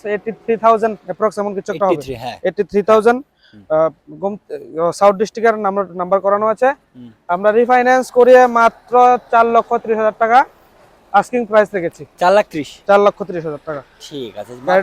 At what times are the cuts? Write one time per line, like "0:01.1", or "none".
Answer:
none